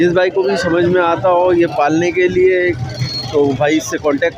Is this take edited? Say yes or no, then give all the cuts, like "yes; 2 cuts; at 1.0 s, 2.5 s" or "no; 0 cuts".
no; 0 cuts